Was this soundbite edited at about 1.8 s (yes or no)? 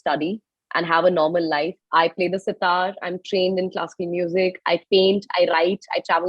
yes